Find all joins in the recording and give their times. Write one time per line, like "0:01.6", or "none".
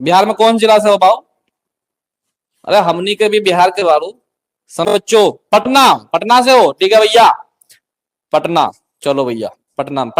0:04.9

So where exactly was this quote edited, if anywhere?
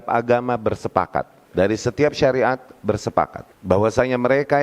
0:01.4
0:03.5

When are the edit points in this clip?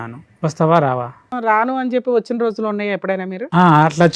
0:01.3

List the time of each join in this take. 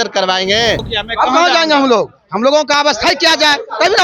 0:00.9

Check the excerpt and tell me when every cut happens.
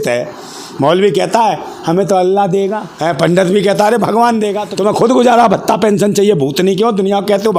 0:02.9
0:04.6

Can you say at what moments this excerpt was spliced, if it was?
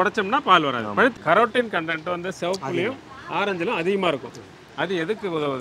0:01.1

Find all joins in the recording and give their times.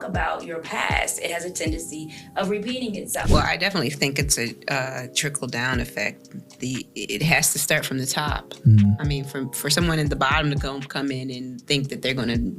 0:03.2

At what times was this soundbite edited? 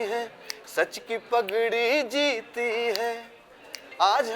none

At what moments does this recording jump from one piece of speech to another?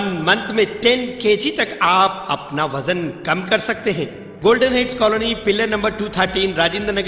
0:04.2

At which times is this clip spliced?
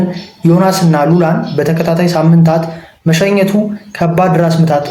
none

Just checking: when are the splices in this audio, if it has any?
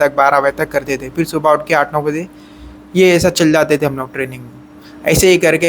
none

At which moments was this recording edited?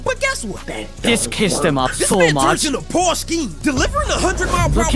0:03.5

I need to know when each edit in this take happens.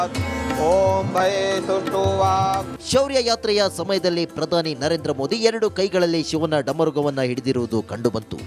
none

